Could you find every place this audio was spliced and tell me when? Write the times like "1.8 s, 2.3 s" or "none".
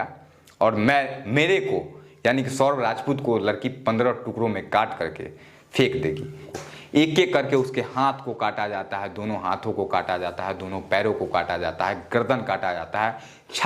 6.5 s

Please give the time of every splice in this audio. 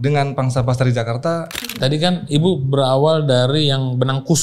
1.5 s

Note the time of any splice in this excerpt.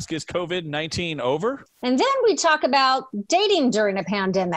1.7 s

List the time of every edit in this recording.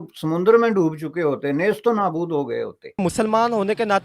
3.0 s

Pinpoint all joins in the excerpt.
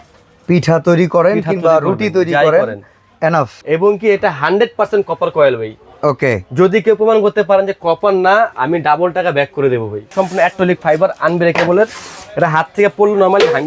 3.6 s, 10.1 s

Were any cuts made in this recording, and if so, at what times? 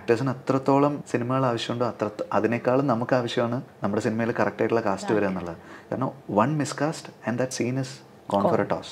1.0 s, 3.7 s

